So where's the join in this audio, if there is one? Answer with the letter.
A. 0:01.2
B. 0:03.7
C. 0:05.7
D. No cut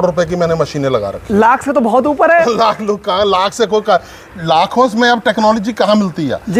D